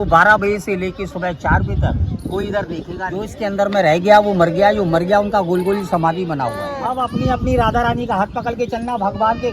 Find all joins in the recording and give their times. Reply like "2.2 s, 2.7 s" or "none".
3.3 s, 6.7 s